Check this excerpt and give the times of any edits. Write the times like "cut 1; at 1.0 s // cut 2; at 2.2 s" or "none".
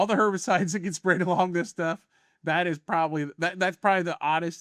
none